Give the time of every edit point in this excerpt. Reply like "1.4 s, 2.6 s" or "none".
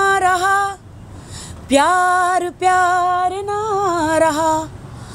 none